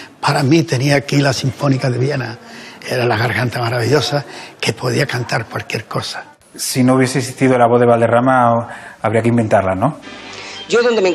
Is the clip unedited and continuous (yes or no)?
no